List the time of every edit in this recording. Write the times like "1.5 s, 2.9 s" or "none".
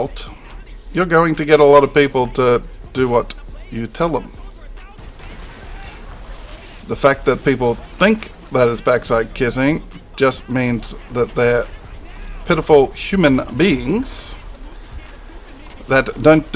5.0 s